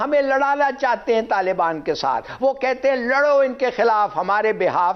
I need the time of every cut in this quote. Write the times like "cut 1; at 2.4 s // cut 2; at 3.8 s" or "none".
none